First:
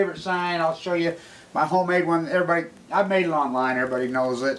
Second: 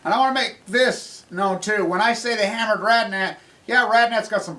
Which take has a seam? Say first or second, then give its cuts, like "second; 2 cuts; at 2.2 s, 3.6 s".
first; 1 cut; at 2.5 s